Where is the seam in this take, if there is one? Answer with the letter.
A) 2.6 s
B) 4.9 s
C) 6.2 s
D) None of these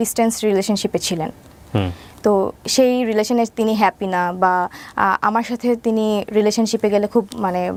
D